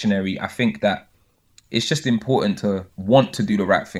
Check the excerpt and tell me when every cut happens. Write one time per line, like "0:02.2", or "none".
0:02.9